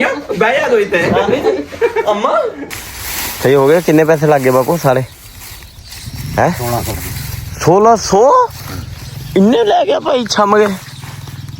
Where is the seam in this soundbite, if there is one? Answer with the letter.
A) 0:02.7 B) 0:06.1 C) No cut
A